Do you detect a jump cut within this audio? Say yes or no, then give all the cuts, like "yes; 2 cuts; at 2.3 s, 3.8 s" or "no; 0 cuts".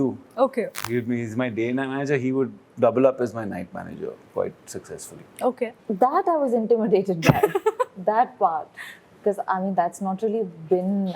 yes; 1 cut; at 5.8 s